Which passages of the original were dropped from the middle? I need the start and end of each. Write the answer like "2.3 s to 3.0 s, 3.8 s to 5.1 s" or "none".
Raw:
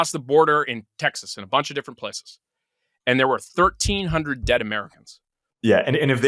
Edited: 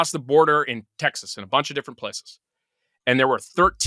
none